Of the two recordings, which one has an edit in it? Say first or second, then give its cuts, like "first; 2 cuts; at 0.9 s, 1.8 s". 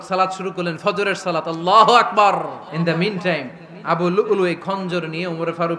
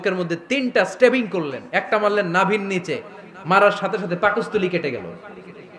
first; 1 cut; at 2.7 s